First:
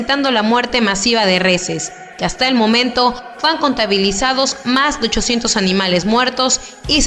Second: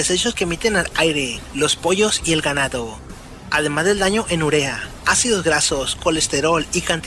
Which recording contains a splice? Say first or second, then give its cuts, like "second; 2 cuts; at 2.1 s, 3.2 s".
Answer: second; 1 cut; at 1.0 s